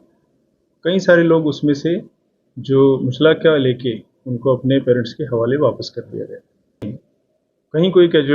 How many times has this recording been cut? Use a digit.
1